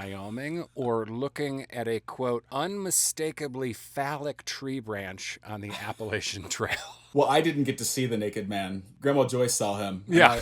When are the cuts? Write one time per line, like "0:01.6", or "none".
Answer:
0:02.5
0:08.8